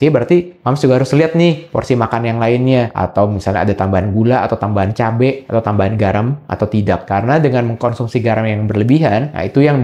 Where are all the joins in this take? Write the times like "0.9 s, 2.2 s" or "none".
none